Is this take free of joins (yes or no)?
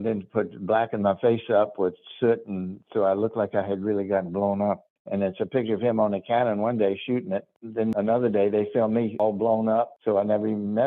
no